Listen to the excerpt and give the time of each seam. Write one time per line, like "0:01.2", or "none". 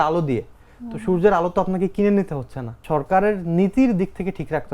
0:02.8